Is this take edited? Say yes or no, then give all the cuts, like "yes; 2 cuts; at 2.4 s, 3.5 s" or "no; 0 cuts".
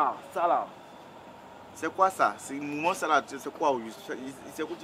no; 0 cuts